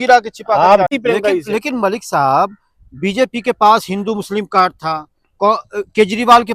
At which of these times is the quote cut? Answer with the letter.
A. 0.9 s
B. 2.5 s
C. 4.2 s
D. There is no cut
A